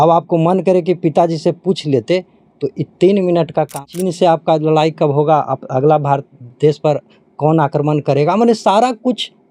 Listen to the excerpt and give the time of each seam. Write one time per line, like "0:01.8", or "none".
0:03.9